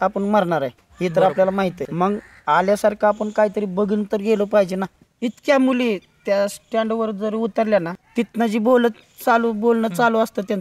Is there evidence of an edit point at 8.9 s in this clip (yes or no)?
no